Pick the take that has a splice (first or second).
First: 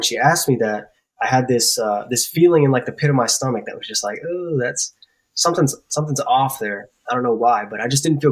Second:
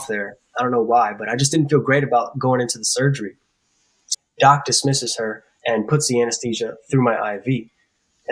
second